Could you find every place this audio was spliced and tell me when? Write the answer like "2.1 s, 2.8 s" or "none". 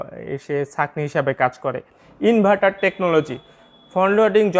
2.0 s